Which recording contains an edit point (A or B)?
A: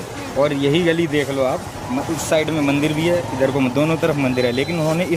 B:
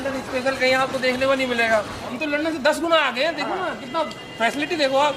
B